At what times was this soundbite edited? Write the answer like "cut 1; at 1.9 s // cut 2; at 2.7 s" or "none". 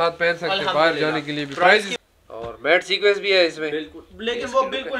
cut 1; at 1.9 s